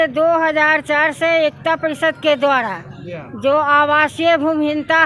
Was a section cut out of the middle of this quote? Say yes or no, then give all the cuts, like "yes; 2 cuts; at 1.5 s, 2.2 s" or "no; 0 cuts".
no; 0 cuts